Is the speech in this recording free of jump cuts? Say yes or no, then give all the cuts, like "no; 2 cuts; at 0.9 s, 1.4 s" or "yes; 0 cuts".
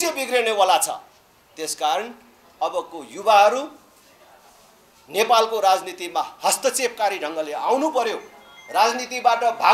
yes; 0 cuts